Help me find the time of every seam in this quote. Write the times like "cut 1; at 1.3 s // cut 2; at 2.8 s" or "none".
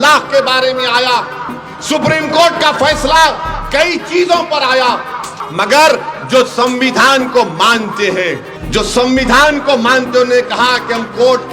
cut 1; at 5.4 s // cut 2; at 8.5 s

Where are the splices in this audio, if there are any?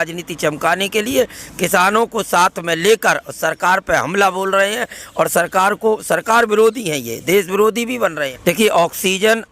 cut 1; at 8.3 s

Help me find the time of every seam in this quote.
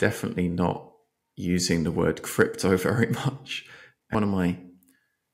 cut 1; at 4.1 s

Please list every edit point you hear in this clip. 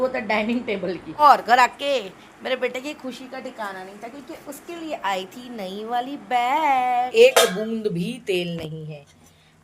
cut 1; at 1.2 s // cut 2; at 7.1 s

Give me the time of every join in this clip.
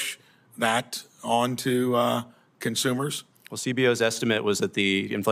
none

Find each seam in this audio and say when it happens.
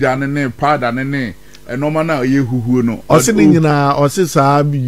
none

